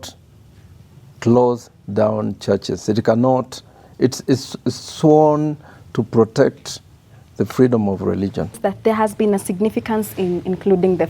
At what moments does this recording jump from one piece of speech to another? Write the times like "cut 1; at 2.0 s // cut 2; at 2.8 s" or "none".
cut 1; at 8.6 s